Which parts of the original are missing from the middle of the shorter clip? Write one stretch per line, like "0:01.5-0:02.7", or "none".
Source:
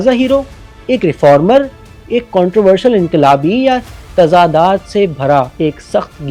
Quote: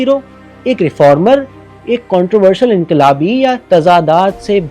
0:03.8-0:04.1